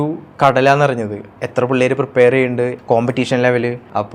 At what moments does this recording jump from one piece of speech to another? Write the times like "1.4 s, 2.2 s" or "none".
2.8 s